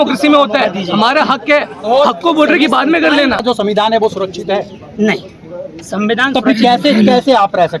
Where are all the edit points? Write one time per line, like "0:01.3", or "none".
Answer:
0:03.4